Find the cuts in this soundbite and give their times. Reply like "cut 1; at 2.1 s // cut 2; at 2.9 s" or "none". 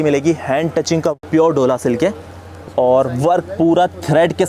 cut 1; at 1.2 s